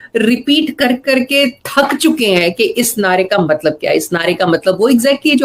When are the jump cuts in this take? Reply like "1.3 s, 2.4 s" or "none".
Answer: none